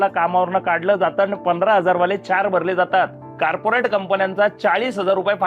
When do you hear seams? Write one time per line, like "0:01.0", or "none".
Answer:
0:03.2

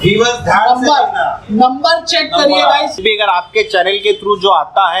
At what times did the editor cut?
0:03.0

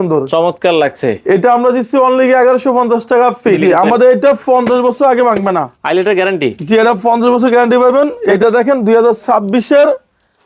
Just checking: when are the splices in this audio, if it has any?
0:03.7
0:08.2

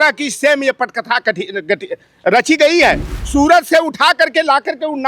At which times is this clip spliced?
0:03.1

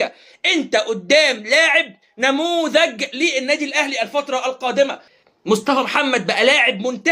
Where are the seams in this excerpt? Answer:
0:05.2

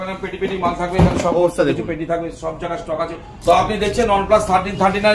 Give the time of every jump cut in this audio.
0:03.4

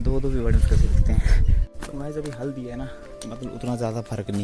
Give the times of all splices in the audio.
0:01.7

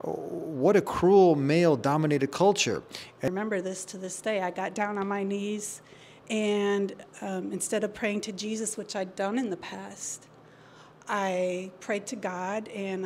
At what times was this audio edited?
0:03.3

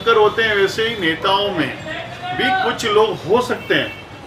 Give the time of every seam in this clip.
none

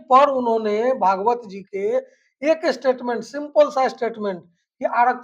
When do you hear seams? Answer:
none

